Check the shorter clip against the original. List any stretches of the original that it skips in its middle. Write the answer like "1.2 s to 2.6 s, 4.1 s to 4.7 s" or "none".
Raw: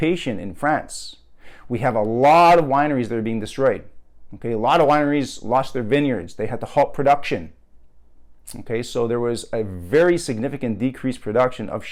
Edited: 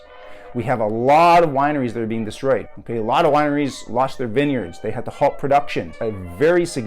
3.9 s to 4.3 s, 7.5 s to 9.5 s